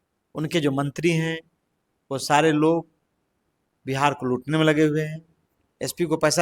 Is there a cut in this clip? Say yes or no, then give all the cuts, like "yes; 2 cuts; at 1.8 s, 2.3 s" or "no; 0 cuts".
yes; 1 cut; at 5.2 s